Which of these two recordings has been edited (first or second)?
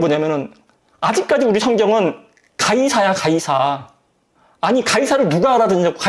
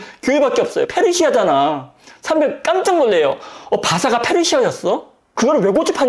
second